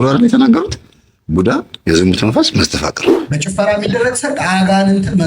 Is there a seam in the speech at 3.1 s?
yes; 1 cut; at 3.1 s

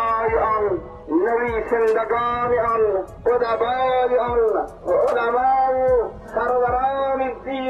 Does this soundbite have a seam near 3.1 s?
yes; 4 cuts; at 0.9 s, 3.1 s, 4.7 s, 6.2 s

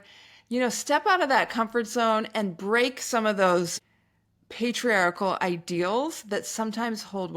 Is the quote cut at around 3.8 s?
yes; 1 cut; at 3.8 s

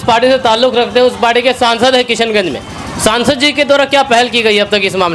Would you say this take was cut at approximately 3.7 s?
no; 0 cuts

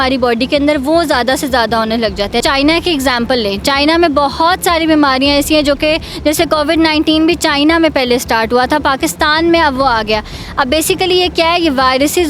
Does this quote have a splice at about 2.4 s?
yes; 1 cut; at 2.4 s

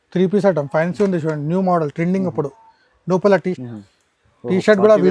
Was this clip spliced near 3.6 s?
yes; 1 cut; at 3.6 s

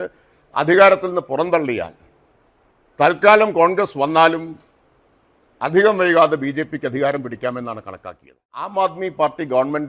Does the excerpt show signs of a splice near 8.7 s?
yes; 1 cut; at 8.7 s

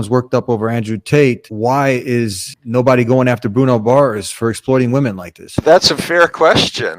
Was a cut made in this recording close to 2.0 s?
no; 1 cut; at 5.6 s

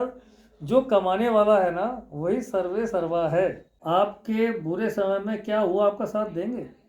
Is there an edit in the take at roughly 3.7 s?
yes; 1 cut; at 3.7 s

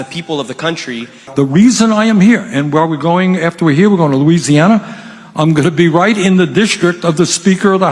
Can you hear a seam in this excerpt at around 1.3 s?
yes; 1 cut; at 1.3 s

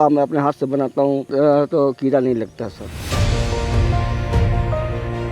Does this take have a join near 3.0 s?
no; 1 cut; at 1.3 s

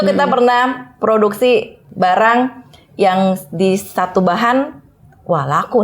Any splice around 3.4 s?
no; 1 cut; at 1.8 s

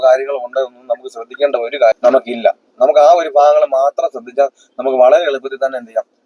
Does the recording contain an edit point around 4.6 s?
no; 1 cut; at 2.0 s

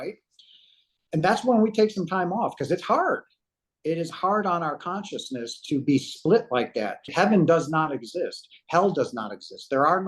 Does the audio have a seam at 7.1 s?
yes; 1 cut; at 7.1 s

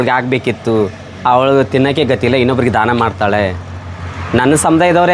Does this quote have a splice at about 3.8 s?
no; 0 cuts

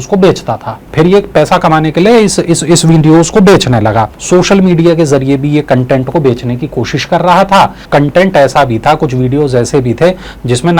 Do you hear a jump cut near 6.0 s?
no; 3 cuts; at 0.8 s, 4.2 s, 7.8 s

